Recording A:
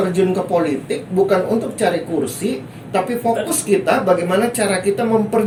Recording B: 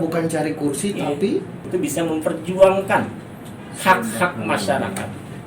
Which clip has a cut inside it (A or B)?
B